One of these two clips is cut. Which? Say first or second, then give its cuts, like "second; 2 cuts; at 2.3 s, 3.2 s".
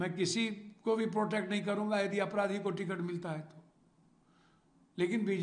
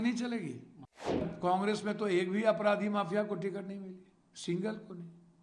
second; 1 cut; at 1.3 s